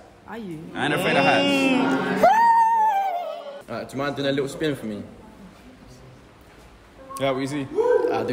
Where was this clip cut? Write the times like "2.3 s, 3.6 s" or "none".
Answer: 3.6 s